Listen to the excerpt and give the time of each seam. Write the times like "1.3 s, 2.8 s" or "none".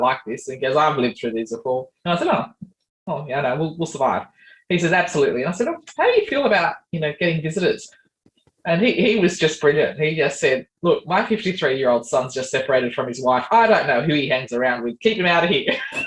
none